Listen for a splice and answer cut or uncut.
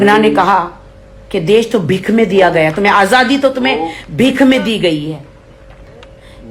uncut